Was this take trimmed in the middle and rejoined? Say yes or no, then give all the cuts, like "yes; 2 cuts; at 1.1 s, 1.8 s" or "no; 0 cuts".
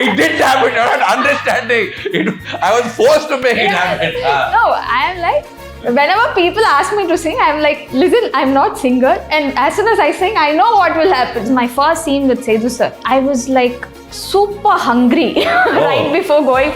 yes; 3 cuts; at 7.8 s, 11.5 s, 13.0 s